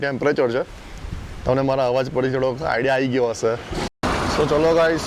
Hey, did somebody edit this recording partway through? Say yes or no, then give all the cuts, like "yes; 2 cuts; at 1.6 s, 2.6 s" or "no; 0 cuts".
yes; 1 cut; at 3.8 s